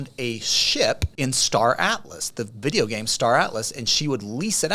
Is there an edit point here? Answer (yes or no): yes